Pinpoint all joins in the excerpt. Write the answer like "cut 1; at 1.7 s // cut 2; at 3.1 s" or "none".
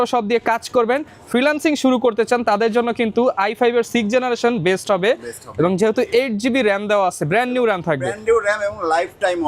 none